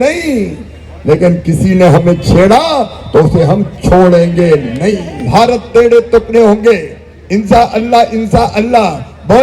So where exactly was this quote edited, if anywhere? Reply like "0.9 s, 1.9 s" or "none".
5.1 s